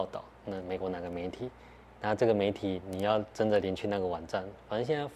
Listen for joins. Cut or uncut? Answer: uncut